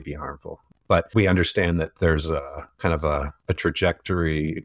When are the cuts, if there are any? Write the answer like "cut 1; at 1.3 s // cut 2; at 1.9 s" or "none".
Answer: cut 1; at 1.1 s // cut 2; at 3.3 s

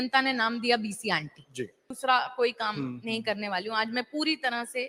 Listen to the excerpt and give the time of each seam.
cut 1; at 1.9 s

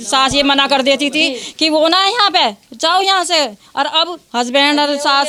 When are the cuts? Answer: none

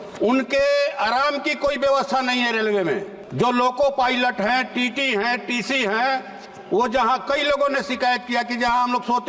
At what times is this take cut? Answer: cut 1; at 3.2 s

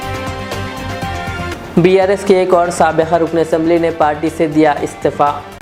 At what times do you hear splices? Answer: none

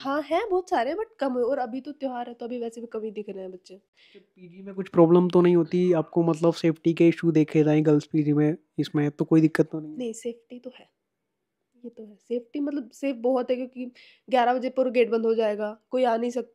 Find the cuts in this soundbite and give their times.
none

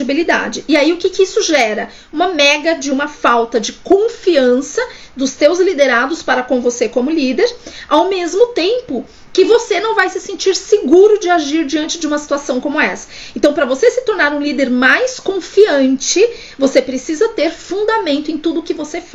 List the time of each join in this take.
none

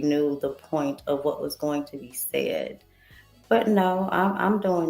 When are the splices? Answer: none

